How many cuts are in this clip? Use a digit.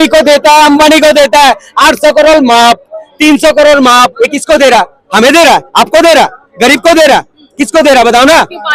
0